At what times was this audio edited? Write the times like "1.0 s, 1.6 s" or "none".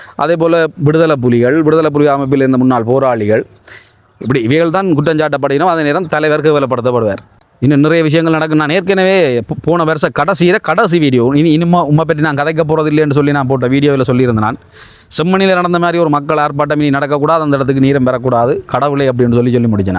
7.3 s